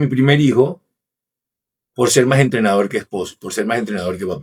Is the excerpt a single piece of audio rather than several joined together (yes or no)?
yes